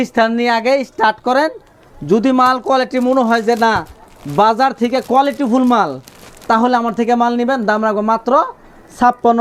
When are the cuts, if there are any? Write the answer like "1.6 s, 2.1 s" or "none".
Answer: none